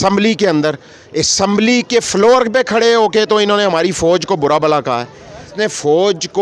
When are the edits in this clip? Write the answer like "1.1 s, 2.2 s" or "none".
5.5 s